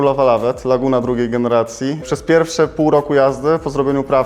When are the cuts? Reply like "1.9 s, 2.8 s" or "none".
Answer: 2.0 s